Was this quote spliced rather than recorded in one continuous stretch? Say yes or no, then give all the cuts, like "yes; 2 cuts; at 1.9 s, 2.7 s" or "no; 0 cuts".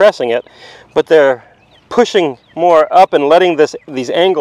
no; 0 cuts